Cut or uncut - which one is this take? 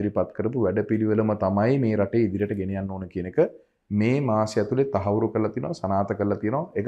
uncut